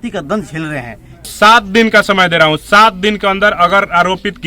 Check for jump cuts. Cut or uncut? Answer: cut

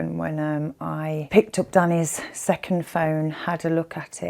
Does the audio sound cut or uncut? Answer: cut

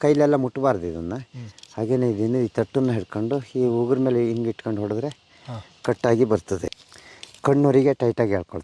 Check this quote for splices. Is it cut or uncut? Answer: cut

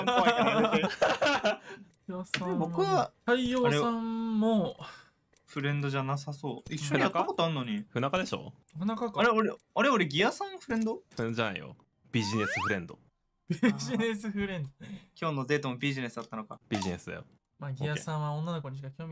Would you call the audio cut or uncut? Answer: uncut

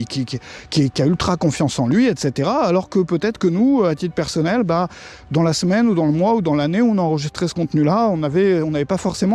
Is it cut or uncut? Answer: uncut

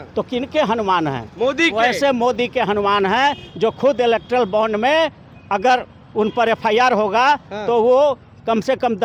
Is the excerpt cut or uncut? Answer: uncut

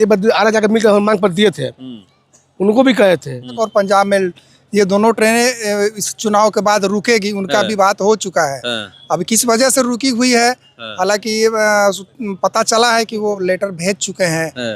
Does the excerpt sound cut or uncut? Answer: cut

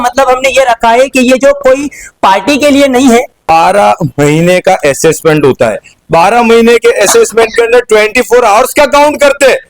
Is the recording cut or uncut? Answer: cut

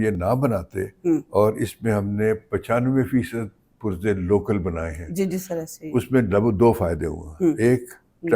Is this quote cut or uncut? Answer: uncut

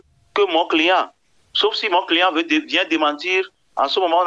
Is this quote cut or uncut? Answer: uncut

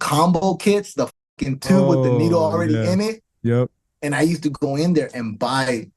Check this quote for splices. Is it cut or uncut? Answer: uncut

